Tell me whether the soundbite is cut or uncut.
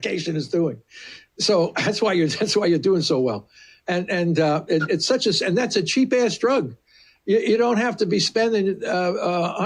uncut